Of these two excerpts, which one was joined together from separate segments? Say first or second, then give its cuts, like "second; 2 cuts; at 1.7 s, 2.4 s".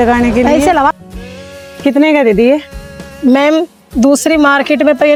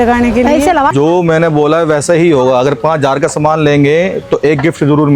second; 1 cut; at 0.9 s